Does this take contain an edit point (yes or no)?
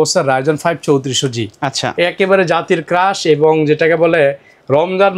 no